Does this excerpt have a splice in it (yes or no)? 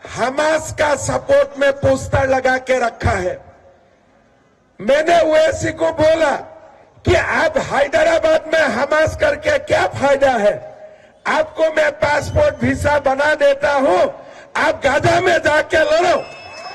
no